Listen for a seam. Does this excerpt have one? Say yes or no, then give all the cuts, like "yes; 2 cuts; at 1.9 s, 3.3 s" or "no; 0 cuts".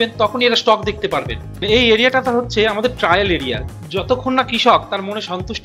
yes; 1 cut; at 1.6 s